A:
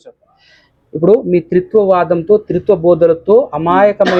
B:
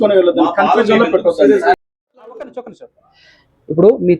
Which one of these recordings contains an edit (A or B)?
B